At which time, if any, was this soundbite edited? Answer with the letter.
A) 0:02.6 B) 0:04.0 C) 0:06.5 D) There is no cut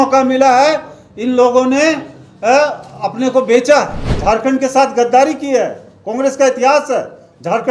B